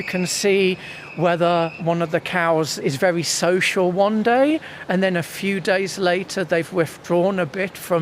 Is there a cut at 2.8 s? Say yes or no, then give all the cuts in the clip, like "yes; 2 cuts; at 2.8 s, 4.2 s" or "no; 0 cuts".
yes; 1 cut; at 2.8 s